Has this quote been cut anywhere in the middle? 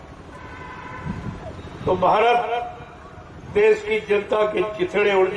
no; 0 cuts

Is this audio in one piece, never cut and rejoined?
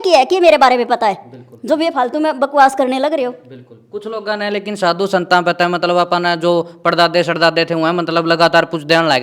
yes; 0 cuts

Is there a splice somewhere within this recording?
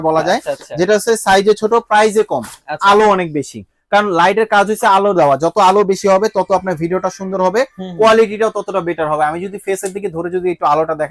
no; 0 cuts

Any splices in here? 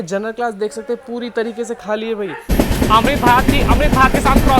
yes; 1 cut; at 2.5 s

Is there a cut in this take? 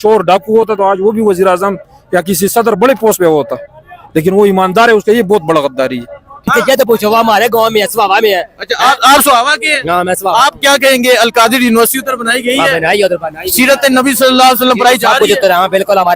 yes; 1 cut; at 6.5 s

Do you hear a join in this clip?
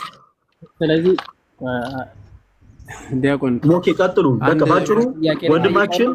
no; 0 cuts

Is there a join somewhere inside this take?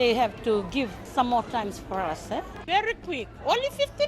yes; 2 cuts; at 1.0 s, 2.5 s

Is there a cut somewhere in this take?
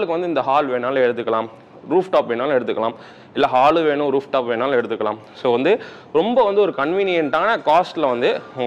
no; 0 cuts

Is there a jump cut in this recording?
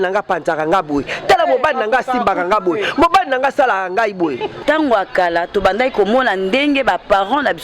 yes; 1 cut; at 4.5 s

